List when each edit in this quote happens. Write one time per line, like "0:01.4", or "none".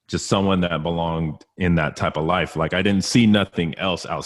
none